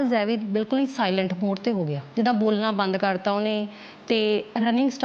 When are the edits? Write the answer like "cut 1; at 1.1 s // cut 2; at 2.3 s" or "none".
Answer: cut 1; at 2.0 s

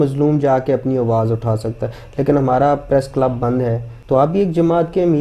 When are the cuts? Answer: cut 1; at 3.9 s

